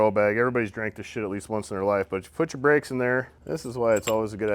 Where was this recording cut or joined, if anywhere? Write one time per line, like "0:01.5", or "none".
0:03.4